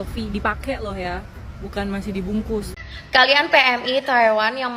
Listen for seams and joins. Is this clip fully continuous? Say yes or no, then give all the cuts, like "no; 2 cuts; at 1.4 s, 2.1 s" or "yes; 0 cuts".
no; 1 cut; at 2.7 s